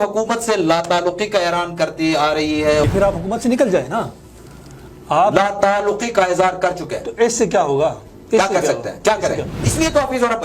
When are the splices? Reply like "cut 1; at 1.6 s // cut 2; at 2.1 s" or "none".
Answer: cut 1; at 2.8 s // cut 2; at 9.6 s